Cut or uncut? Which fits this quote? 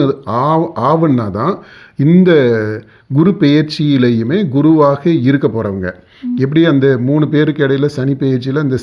uncut